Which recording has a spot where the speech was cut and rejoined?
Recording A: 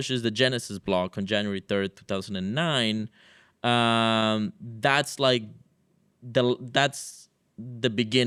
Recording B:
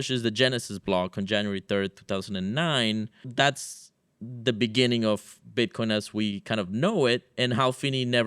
B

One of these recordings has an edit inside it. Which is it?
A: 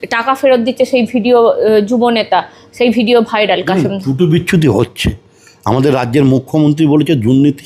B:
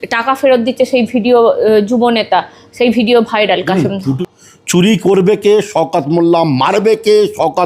B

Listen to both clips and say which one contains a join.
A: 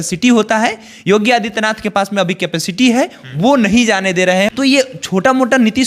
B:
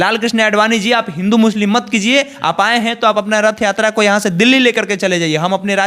A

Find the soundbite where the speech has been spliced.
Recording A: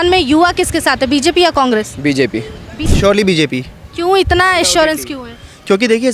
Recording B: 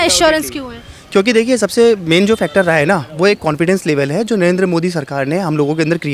A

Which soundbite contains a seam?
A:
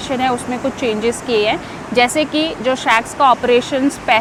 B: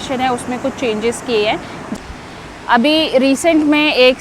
B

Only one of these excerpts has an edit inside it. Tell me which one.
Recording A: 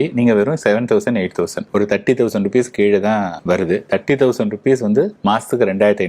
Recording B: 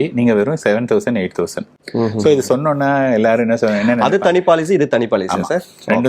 A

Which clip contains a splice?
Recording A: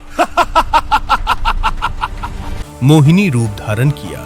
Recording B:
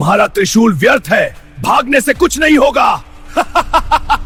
A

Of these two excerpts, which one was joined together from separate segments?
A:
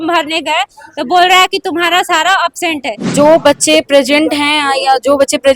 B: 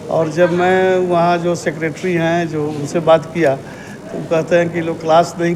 A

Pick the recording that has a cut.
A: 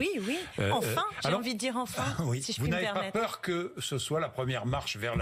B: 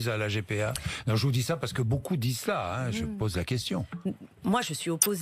A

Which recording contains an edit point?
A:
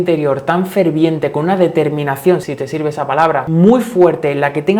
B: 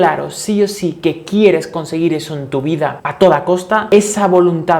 A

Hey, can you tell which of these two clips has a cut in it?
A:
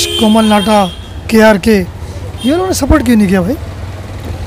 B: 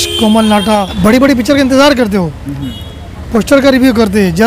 B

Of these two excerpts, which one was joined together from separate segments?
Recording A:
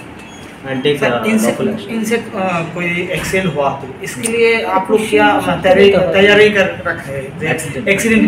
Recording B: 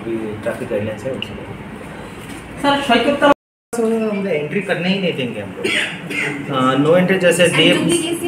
B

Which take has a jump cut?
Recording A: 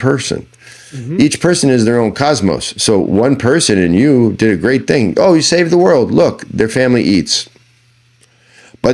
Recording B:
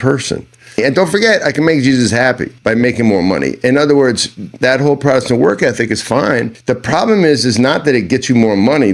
B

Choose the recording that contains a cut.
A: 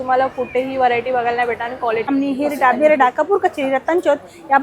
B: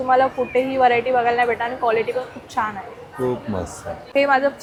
A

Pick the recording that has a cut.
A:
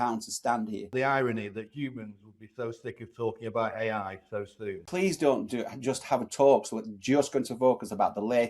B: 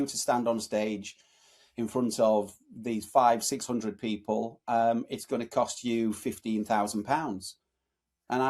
A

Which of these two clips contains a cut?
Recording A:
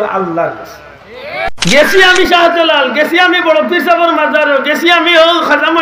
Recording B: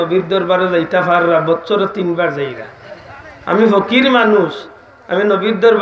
A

